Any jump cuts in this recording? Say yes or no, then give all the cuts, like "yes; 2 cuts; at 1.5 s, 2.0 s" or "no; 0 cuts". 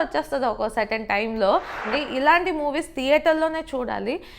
yes; 1 cut; at 1.9 s